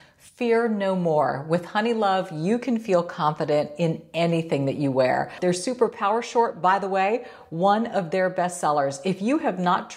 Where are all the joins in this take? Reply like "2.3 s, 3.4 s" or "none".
5.3 s